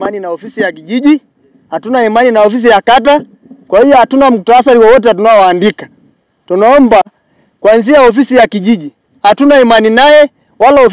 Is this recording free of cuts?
yes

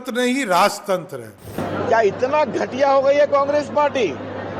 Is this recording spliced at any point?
yes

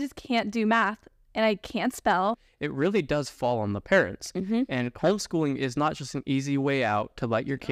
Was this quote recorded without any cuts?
no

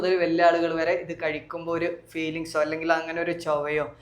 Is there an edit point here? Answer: no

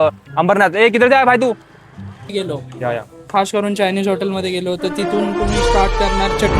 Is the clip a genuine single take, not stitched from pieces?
no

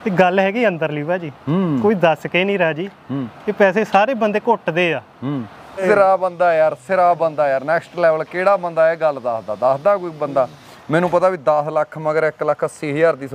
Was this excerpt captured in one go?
no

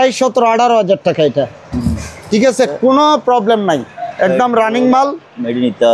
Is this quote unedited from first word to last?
yes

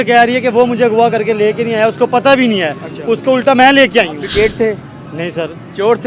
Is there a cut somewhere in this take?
yes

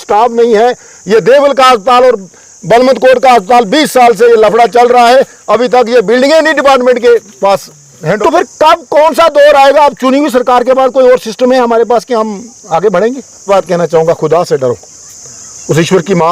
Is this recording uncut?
no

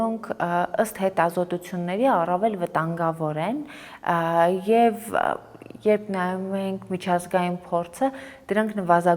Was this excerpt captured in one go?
yes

